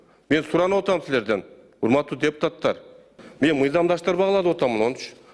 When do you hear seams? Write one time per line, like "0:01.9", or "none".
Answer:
none